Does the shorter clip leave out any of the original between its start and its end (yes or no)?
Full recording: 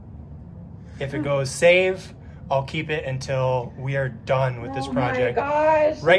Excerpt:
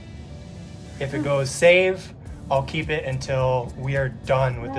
no